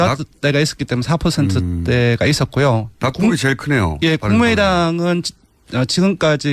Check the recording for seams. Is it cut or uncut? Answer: uncut